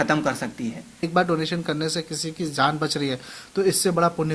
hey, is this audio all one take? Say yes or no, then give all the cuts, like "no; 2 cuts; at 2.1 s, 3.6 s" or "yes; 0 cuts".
no; 1 cut; at 1.1 s